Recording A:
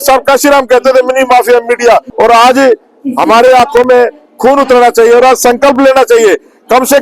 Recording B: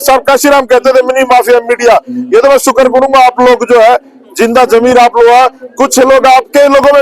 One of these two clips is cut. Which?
A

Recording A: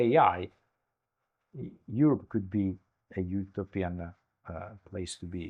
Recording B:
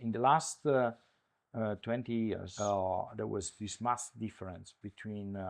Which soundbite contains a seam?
B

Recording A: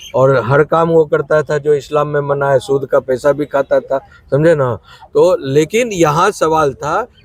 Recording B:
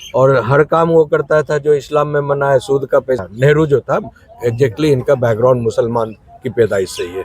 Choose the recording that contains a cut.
B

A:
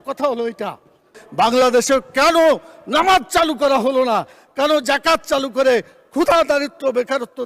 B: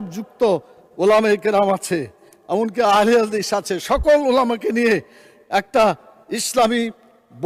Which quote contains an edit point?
A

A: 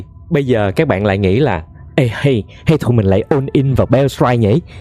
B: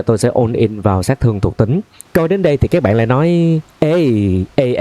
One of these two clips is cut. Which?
B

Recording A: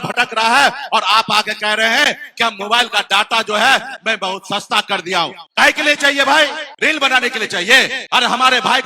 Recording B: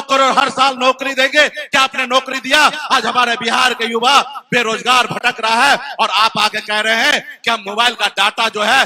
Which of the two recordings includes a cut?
A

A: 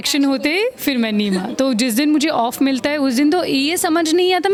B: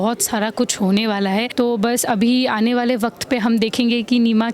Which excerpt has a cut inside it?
B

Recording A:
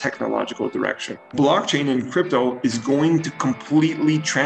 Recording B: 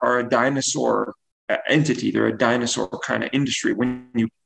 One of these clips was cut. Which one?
A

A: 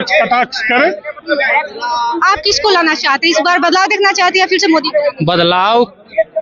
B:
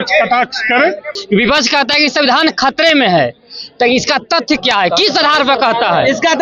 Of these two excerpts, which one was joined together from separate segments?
B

